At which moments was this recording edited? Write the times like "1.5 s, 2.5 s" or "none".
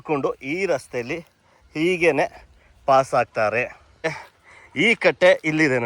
4.3 s